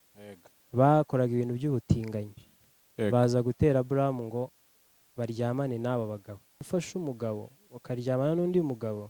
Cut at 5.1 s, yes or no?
no